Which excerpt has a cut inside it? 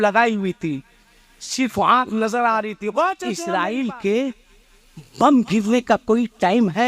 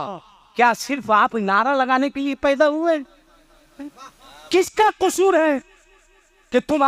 first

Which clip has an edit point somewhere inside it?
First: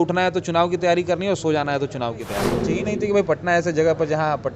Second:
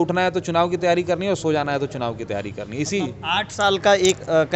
first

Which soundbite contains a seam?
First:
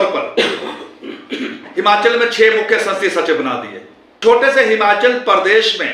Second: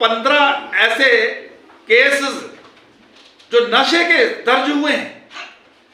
first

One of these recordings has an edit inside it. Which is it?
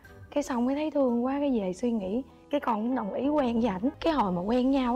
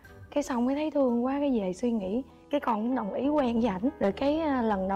first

